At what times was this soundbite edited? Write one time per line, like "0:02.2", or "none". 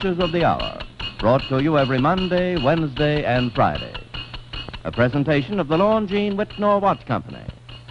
0:04.9